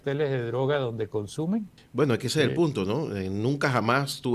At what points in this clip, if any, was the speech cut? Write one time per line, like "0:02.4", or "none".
0:01.8